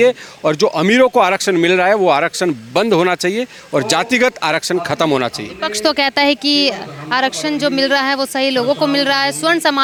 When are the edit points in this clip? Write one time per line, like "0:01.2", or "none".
none